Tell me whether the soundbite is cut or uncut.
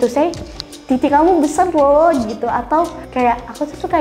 cut